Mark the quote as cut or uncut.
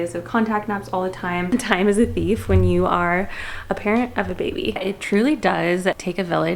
cut